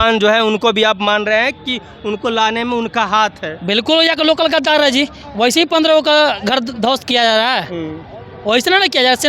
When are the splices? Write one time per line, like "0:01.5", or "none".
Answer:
none

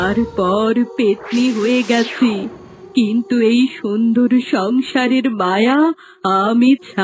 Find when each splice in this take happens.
none

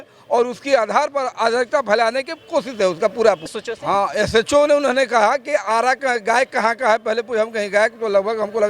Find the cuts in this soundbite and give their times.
0:03.5

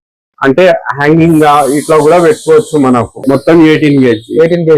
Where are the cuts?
0:03.1

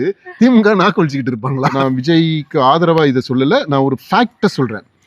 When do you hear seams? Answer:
0:01.7

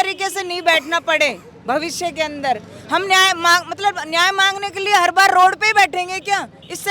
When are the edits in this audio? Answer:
none

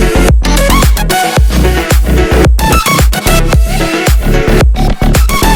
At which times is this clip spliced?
none

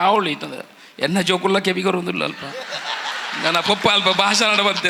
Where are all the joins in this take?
none

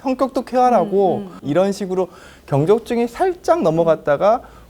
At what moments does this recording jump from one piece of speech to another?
0:01.4

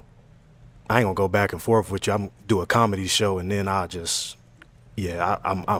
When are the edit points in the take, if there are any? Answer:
none

